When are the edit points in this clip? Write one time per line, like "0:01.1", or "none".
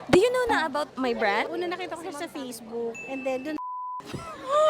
0:00.9